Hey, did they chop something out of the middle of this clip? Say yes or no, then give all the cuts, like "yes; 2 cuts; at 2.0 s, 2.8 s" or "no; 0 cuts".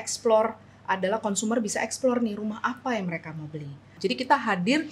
yes; 1 cut; at 3.9 s